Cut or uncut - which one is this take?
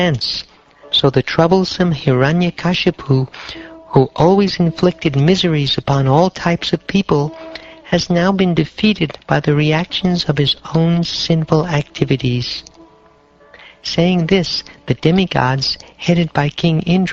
cut